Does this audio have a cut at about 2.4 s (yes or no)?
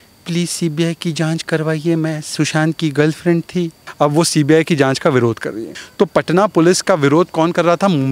no